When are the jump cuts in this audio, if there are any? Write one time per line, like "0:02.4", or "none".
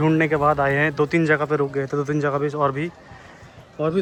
none